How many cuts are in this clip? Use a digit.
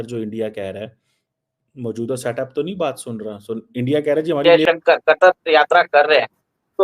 1